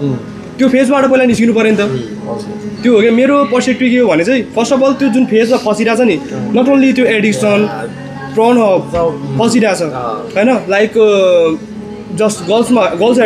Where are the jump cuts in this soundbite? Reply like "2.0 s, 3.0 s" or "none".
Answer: none